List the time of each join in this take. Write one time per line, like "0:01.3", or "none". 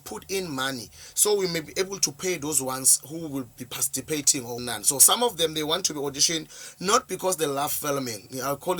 0:04.6